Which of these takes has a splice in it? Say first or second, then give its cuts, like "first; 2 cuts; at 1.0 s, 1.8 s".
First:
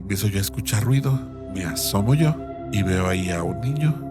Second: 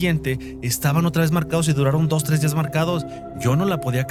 first; 2 cuts; at 1.4 s, 2.5 s